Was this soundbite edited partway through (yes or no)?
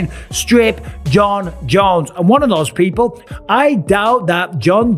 yes